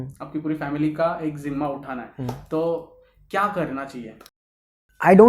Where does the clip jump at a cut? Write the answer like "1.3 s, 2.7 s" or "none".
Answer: 4.4 s